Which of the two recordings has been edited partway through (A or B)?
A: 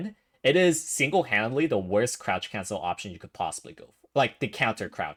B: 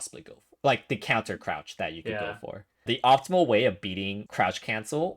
B